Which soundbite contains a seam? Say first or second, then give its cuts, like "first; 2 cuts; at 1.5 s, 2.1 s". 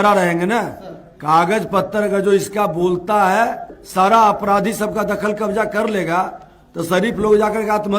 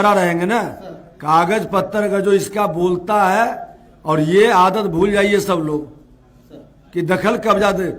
first; 1 cut; at 3.8 s